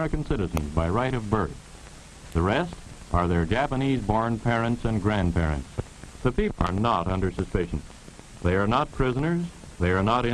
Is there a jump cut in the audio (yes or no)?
yes